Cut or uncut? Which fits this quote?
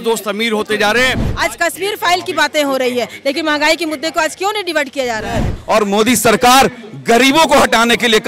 cut